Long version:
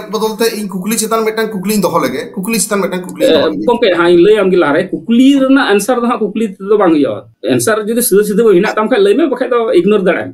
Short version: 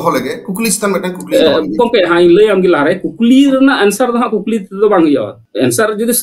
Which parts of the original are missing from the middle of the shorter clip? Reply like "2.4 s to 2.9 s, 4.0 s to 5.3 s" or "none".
none